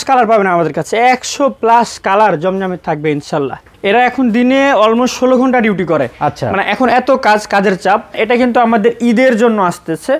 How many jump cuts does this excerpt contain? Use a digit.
2